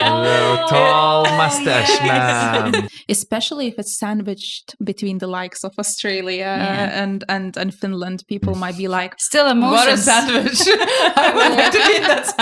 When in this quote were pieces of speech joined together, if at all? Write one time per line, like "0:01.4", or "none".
0:02.9